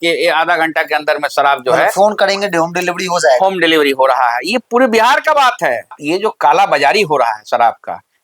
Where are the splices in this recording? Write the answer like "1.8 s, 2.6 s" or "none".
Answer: 6.0 s